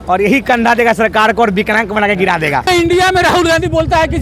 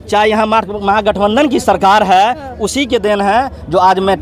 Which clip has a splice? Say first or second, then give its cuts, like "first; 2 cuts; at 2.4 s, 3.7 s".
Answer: first; 1 cut; at 2.7 s